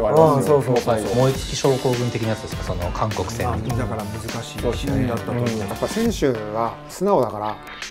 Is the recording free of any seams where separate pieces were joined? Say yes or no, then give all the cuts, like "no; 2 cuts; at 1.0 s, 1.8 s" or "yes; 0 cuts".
no; 3 cuts; at 1.1 s, 3.4 s, 5.7 s